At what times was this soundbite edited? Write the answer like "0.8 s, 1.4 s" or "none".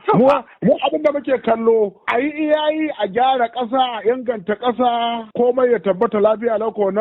2.0 s